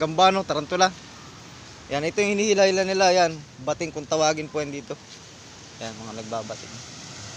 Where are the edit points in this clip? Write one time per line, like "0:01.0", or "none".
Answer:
none